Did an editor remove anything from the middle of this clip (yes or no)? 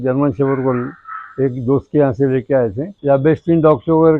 yes